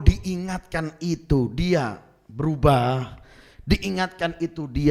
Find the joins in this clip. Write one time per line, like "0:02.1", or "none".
none

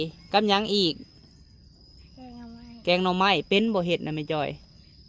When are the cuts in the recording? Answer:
none

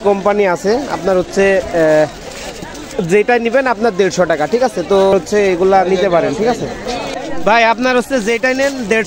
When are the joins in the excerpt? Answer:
0:05.1
0:07.2

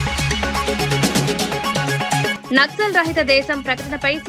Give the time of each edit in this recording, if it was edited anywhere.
0:02.3

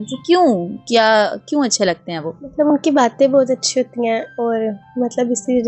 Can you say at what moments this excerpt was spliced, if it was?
none

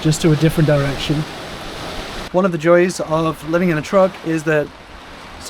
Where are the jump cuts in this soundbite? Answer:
0:02.1

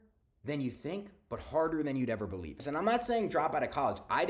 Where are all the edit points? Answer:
0:02.6

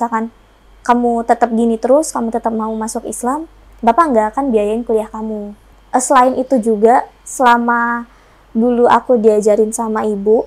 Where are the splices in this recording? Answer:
0:05.7

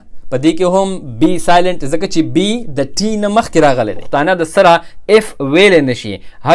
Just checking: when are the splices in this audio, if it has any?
0:04.0

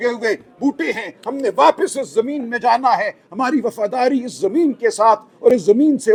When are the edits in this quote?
none

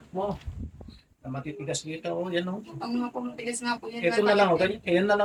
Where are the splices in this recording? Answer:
none

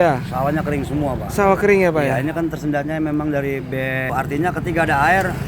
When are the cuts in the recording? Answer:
0:04.1

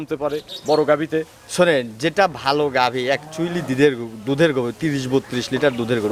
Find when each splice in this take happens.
none

